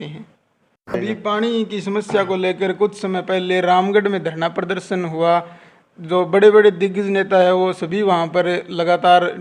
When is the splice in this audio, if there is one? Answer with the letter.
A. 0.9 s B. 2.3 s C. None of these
A